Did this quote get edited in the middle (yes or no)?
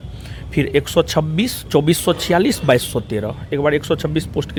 no